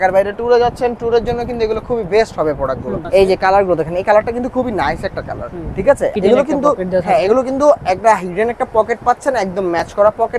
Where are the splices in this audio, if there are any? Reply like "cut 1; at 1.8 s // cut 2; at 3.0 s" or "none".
cut 1; at 3.0 s // cut 2; at 6.1 s